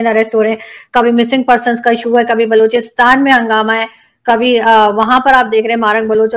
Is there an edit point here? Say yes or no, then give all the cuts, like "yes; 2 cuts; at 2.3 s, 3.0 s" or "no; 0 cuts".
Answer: no; 0 cuts